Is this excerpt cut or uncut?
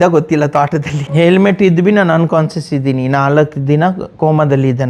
cut